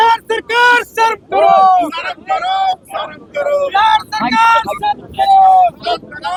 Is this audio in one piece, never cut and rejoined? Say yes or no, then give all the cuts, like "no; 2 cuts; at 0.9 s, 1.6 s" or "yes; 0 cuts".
yes; 0 cuts